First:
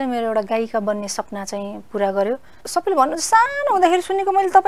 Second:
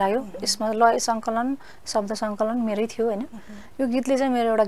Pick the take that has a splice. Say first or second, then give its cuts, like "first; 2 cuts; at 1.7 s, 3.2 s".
first; 1 cut; at 2.5 s